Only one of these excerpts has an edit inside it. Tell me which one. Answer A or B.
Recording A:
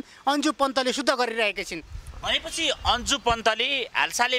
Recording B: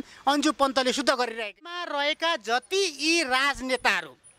B